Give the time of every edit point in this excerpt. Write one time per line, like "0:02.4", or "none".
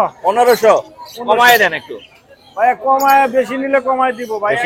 none